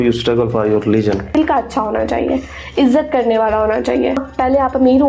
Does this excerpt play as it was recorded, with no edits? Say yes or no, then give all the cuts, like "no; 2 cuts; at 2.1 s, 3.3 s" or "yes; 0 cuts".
no; 2 cuts; at 1.3 s, 4.3 s